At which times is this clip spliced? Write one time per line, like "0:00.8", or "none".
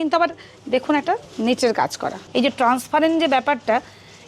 0:02.2

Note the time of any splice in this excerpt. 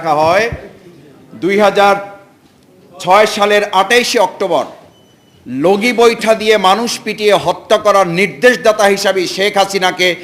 none

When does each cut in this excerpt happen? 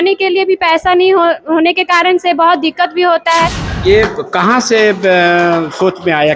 0:03.6

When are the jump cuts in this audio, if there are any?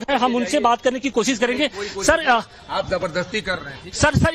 0:03.0

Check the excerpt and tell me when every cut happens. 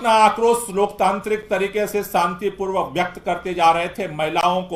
none

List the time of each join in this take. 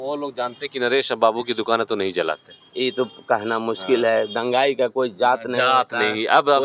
none

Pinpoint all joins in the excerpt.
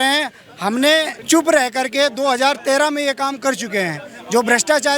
0:01.2

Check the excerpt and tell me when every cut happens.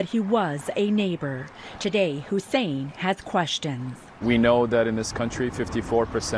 0:01.5

